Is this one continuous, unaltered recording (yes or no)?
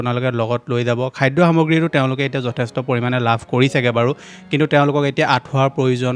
yes